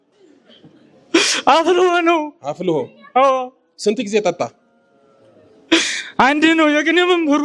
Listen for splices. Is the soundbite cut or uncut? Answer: uncut